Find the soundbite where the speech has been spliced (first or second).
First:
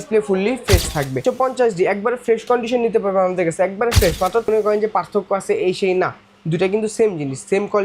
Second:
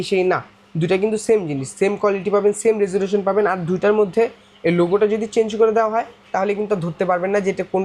first